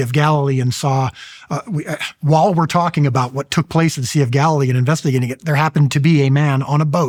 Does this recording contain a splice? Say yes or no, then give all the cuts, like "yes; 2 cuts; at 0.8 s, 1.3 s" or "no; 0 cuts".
no; 0 cuts